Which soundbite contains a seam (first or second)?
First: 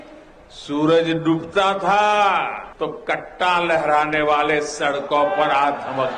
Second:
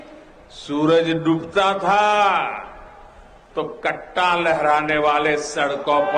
first